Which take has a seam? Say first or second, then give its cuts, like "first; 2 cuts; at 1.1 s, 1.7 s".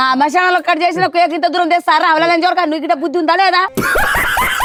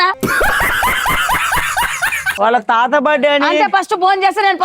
second; 1 cut; at 2.4 s